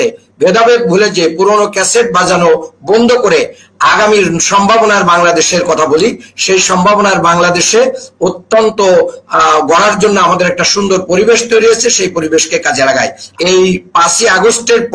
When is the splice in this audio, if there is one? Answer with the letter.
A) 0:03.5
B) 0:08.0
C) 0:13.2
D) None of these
C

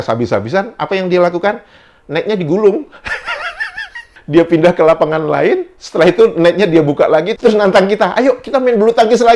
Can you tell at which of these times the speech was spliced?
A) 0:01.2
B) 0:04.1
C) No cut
B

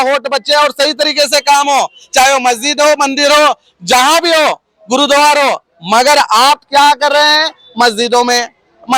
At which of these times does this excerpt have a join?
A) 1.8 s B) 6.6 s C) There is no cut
C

